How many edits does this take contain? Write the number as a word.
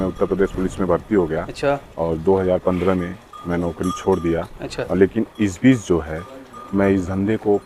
zero